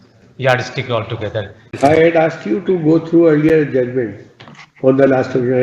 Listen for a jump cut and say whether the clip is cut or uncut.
cut